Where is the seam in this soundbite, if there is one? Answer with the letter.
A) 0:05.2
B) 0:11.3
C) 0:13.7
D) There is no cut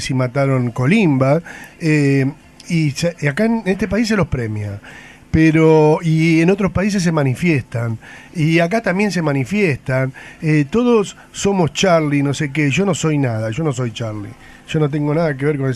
A